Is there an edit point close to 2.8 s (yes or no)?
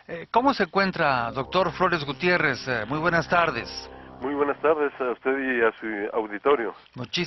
yes